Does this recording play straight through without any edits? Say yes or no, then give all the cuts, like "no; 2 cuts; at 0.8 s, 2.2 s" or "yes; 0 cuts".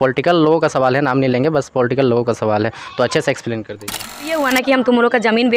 no; 1 cut; at 4.3 s